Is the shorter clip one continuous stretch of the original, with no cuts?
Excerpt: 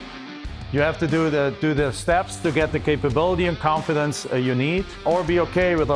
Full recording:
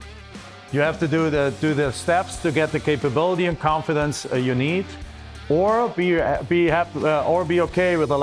no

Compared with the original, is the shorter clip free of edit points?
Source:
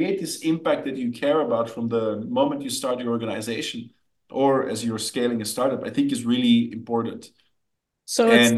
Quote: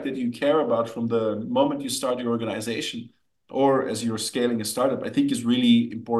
yes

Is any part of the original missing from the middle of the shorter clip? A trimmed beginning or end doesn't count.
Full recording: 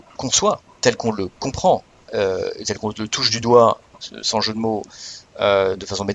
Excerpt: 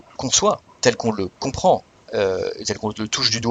no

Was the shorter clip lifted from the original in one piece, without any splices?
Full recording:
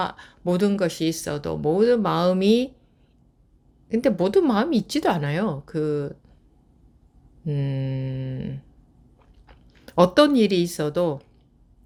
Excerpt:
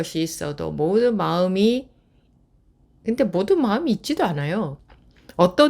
no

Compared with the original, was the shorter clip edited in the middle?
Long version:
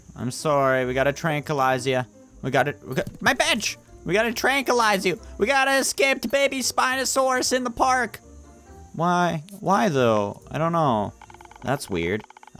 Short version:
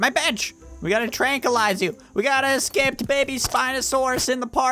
no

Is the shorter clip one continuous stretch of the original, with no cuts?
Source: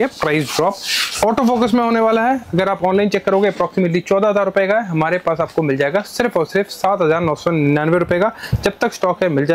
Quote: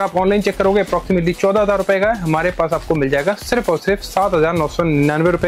yes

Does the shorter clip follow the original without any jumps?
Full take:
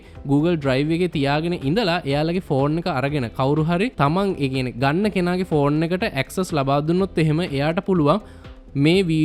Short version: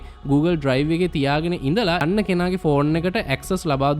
no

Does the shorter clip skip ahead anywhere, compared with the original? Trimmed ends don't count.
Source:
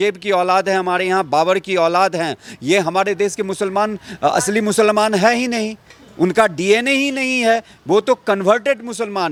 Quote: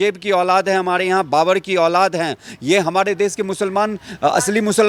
no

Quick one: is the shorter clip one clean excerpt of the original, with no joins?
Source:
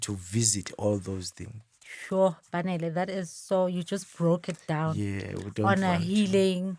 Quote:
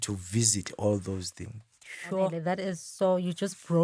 no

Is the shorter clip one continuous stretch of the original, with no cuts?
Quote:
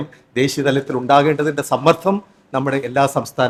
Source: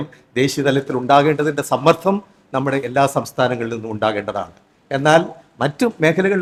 yes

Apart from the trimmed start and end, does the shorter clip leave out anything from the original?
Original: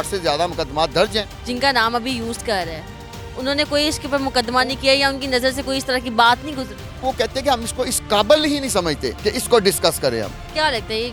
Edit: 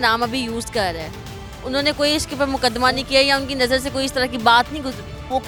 no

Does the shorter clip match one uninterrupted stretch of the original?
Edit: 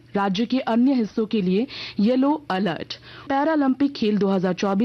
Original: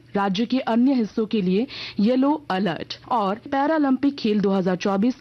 no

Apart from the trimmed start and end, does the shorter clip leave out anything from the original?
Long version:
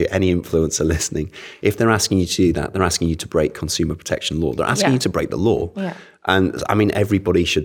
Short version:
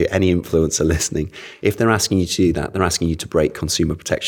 no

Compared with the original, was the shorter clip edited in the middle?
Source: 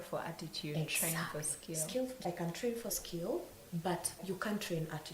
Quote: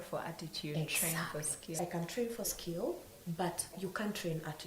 yes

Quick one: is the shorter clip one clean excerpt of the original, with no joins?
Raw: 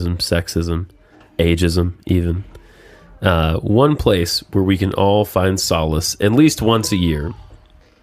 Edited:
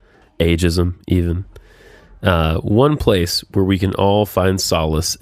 yes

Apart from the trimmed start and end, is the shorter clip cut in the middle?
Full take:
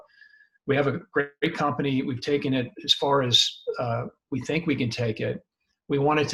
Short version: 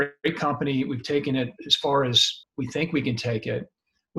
yes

